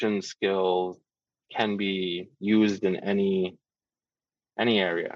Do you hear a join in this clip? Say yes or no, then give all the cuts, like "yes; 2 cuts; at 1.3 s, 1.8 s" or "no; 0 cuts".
no; 0 cuts